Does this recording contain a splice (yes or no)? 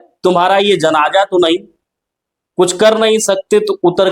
no